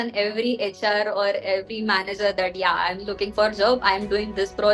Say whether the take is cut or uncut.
uncut